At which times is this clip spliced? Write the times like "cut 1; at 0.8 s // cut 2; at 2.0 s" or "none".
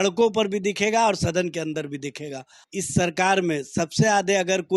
cut 1; at 2.6 s